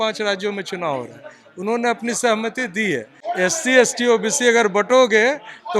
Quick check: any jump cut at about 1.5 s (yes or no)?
no